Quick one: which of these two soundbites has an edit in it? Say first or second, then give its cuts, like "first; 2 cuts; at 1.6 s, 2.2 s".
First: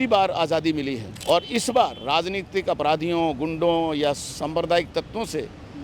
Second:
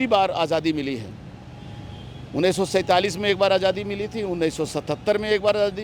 first; 1 cut; at 1.1 s